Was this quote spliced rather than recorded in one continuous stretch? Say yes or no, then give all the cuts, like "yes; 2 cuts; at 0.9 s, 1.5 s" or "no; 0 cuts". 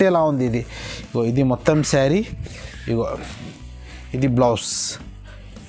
no; 0 cuts